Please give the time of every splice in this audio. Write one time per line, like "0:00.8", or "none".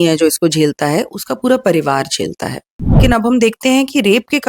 0:03.0